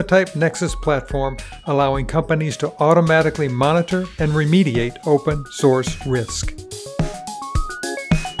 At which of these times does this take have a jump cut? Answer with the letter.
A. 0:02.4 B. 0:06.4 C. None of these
B